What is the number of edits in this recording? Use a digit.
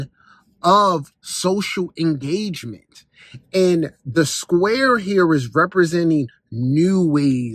0